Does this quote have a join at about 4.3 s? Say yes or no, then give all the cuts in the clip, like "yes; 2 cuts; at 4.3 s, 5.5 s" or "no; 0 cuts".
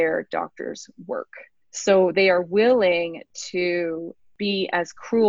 yes; 1 cut; at 4.3 s